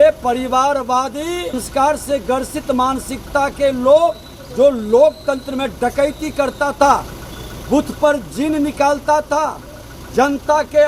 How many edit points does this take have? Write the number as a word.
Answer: one